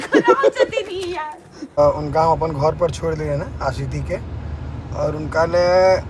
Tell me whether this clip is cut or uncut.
uncut